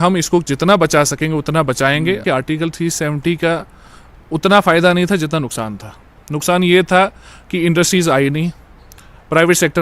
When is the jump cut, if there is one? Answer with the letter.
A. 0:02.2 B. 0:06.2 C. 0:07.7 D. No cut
A